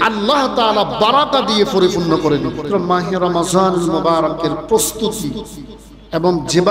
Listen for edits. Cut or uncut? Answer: cut